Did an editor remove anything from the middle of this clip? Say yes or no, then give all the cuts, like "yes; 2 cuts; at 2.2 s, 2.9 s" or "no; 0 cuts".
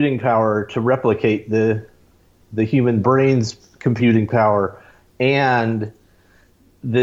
no; 0 cuts